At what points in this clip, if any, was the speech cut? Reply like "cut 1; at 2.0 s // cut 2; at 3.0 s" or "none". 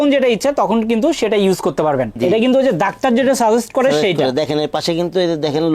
cut 1; at 2.2 s